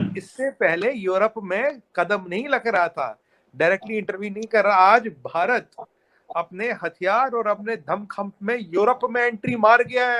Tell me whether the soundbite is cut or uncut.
uncut